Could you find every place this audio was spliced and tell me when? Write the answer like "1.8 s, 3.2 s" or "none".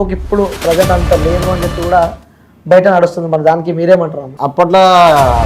4.2 s